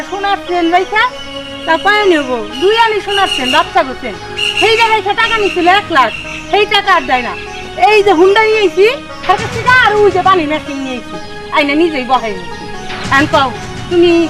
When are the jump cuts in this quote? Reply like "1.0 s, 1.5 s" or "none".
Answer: none